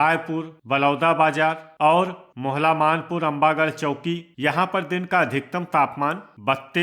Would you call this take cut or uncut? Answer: cut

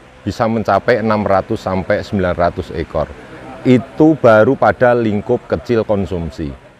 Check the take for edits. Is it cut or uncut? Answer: uncut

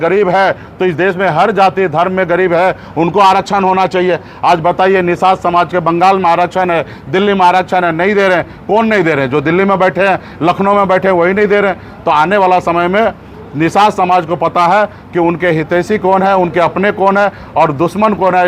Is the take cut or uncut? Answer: uncut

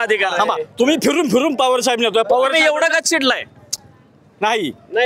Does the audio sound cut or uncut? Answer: uncut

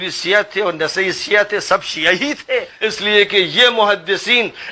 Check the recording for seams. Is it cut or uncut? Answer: cut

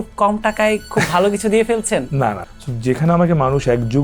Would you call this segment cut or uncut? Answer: cut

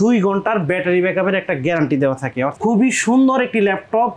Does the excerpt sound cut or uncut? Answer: cut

